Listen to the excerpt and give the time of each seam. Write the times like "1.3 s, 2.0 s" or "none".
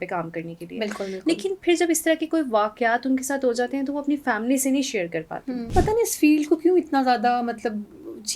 5.6 s